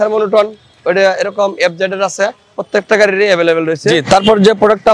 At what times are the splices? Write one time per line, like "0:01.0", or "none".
0:02.5
0:03.9